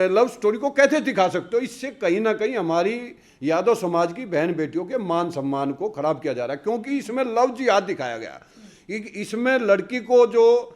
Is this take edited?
no; 0 cuts

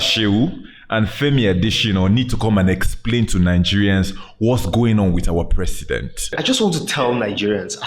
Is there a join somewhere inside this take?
yes; 1 cut; at 6.4 s

